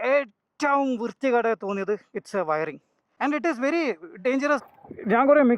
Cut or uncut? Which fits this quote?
cut